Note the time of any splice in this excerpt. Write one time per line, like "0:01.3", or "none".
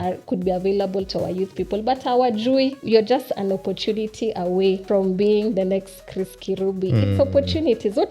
0:02.8
0:04.8